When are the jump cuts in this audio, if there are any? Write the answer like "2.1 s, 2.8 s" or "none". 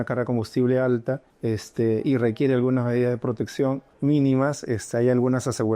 1.3 s, 3.9 s